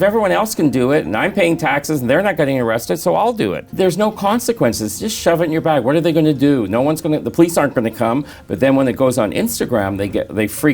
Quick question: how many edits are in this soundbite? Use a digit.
2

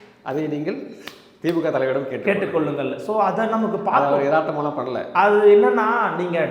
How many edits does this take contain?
0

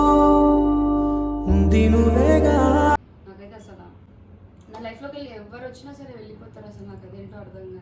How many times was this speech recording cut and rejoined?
1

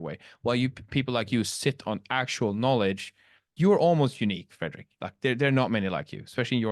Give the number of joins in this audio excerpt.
1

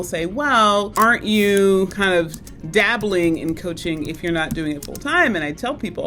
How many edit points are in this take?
2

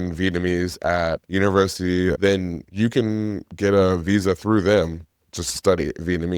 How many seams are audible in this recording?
2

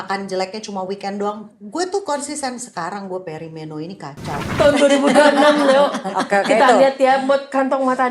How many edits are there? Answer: 1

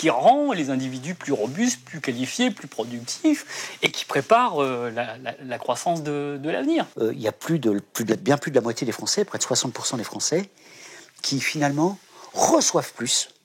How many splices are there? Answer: 1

